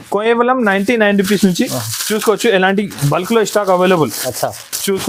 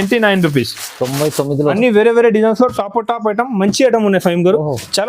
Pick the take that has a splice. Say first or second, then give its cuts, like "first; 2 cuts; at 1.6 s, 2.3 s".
second; 1 cut; at 1.8 s